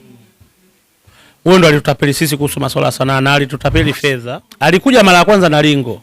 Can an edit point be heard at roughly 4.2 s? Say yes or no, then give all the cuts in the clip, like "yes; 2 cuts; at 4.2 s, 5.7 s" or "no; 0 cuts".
yes; 1 cut; at 4.2 s